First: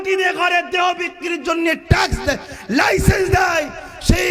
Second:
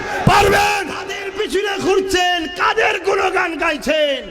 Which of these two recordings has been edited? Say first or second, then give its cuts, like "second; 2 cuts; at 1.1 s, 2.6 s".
second; 1 cut; at 1.2 s